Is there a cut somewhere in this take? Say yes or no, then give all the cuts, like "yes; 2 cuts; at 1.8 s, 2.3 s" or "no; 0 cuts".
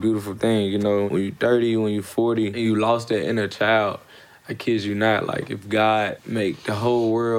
yes; 3 cuts; at 1.1 s, 2.5 s, 6.2 s